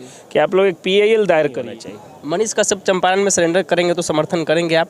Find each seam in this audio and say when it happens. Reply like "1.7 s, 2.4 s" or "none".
1.7 s